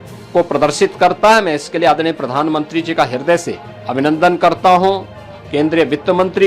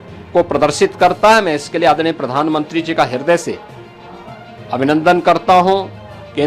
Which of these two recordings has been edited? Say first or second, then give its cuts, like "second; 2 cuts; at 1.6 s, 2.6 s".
first; 1 cut; at 3.7 s